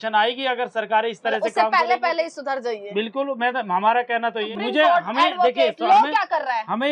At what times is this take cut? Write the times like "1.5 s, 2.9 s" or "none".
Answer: 4.5 s